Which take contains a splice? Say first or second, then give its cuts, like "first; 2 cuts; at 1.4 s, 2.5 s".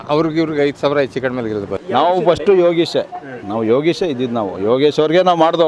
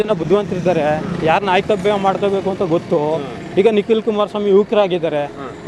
first; 1 cut; at 1.7 s